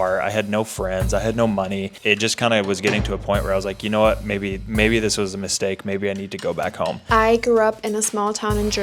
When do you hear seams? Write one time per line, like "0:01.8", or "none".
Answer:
0:07.0